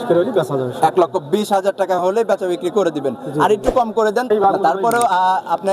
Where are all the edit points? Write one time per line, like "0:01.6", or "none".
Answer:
0:04.3